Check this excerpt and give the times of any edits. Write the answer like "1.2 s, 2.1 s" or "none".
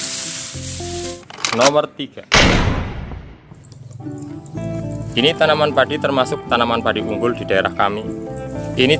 1.2 s, 5.1 s

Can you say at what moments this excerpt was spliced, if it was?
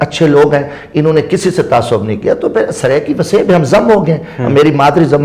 none

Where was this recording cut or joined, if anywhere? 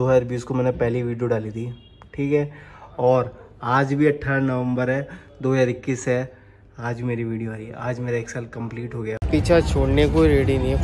9.1 s

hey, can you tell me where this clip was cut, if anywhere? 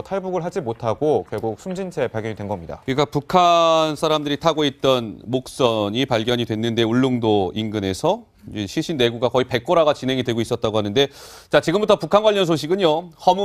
4.8 s

